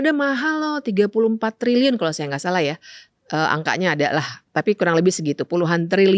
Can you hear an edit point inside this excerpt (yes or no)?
no